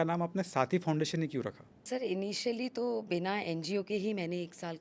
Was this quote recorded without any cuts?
no; 1 cut; at 1.8 s

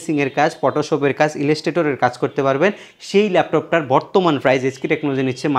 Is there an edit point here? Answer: no; 0 cuts

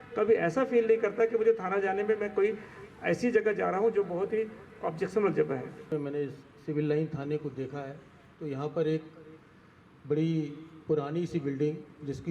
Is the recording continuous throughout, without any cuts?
no; 1 cut; at 5.8 s

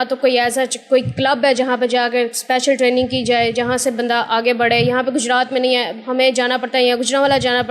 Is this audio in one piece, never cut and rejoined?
yes; 0 cuts

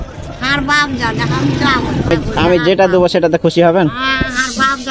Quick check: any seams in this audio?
yes; 1 cut; at 2.1 s

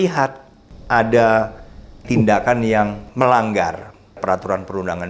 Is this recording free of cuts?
no; 2 cuts; at 2.1 s, 3.0 s

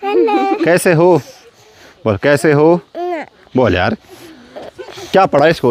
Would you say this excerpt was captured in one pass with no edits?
yes; 0 cuts

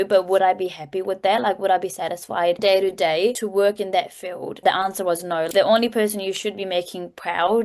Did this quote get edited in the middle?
yes; 4 cuts; at 2.6 s, 3.4 s, 4.6 s, 5.5 s

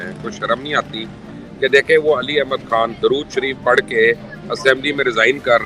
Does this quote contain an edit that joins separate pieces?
no; 0 cuts

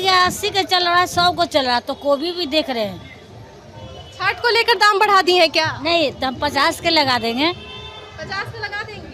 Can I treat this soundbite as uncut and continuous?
yes; 0 cuts

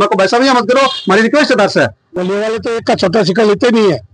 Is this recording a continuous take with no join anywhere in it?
no; 1 cut; at 2.0 s

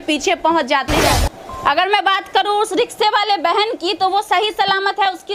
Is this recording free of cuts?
no; 1 cut; at 1.0 s

